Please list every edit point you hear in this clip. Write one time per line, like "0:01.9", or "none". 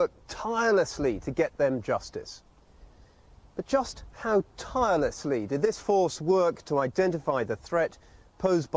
none